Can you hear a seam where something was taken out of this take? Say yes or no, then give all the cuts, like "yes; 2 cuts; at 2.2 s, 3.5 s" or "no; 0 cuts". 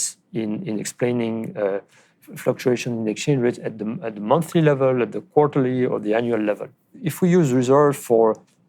yes; 1 cut; at 7.0 s